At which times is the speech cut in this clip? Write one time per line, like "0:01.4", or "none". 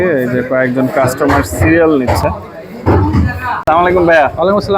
0:03.6